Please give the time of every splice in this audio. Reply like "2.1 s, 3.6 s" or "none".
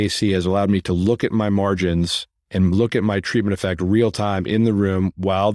none